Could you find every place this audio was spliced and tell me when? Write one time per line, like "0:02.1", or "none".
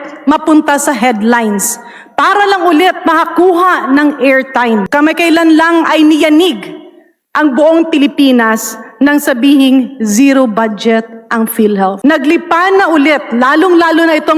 0:04.9
0:12.0